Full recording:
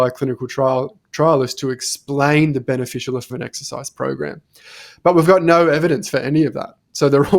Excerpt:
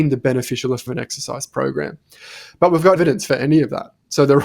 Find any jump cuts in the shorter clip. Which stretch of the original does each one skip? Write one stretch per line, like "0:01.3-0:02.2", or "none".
0:05.4-0:05.8